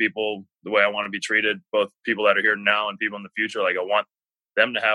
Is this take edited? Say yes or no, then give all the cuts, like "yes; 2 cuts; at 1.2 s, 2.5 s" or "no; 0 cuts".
no; 0 cuts